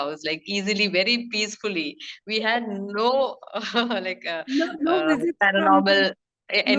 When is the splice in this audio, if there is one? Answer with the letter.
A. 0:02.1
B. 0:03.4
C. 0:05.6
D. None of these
D